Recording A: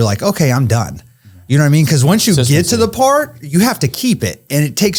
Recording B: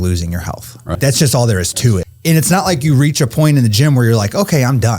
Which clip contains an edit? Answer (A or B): B